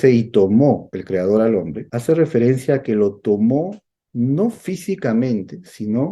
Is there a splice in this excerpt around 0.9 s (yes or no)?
yes